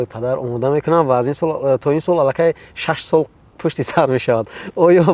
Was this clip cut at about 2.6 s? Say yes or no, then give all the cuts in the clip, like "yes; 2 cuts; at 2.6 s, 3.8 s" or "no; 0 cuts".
no; 0 cuts